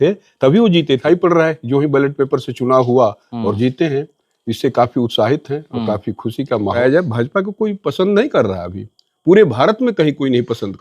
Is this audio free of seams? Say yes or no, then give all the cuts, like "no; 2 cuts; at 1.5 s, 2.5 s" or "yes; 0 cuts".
no; 2 cuts; at 1.0 s, 6.8 s